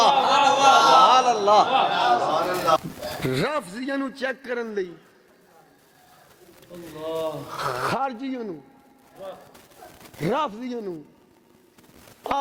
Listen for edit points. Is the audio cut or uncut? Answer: cut